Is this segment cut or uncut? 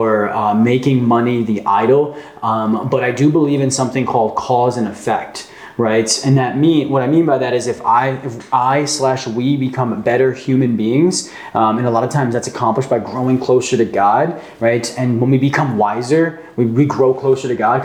uncut